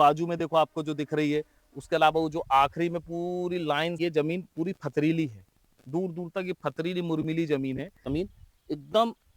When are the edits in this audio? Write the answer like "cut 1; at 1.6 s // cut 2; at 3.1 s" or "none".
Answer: cut 1; at 4.0 s // cut 2; at 8.1 s